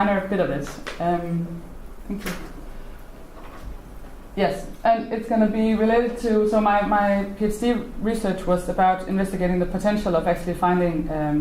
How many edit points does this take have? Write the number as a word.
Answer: one